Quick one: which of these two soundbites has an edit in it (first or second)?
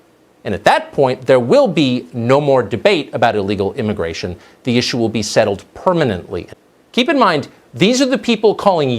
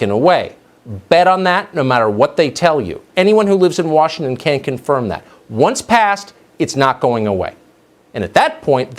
first